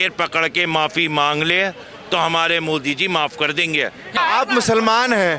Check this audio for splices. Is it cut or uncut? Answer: cut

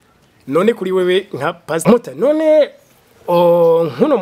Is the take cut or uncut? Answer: cut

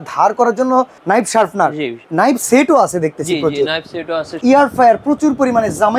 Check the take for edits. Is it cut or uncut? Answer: cut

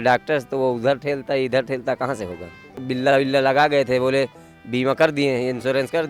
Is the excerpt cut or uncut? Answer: cut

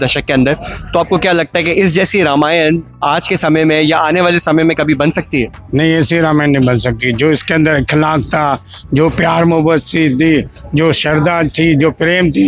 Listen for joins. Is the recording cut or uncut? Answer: uncut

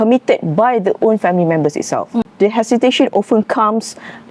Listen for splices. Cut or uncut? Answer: cut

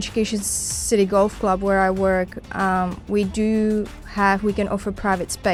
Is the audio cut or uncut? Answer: uncut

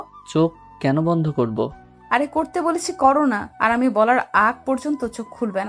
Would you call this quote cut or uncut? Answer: uncut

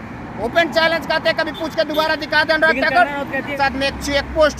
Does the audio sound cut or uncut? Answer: cut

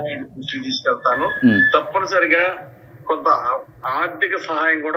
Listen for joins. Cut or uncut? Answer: uncut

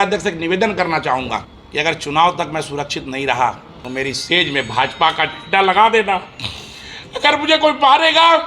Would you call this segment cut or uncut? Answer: cut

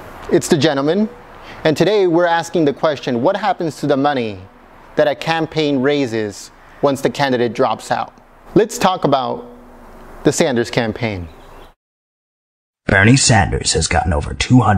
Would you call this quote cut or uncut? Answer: uncut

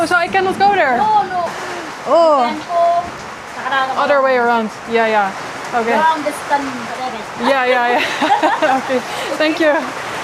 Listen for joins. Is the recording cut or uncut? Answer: uncut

